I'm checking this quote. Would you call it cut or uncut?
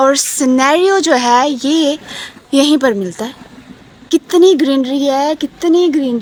uncut